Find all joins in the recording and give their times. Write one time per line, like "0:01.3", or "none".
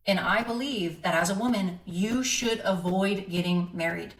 none